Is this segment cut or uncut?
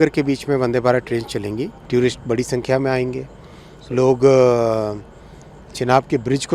cut